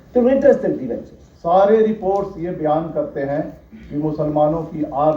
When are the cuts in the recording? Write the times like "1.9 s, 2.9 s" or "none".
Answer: 1.3 s